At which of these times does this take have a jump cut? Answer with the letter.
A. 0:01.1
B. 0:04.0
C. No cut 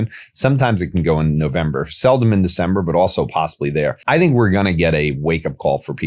B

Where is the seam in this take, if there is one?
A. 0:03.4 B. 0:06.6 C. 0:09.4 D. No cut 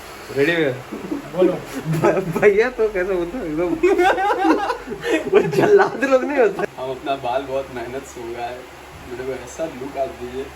B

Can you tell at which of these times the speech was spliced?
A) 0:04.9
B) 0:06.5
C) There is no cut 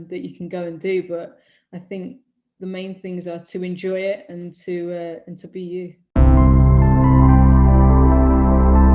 B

